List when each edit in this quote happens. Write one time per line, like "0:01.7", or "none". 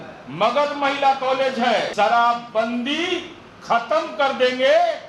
0:01.9